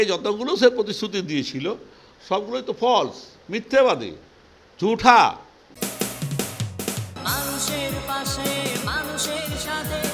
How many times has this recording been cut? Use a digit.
1